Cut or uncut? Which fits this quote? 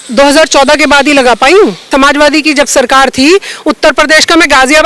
cut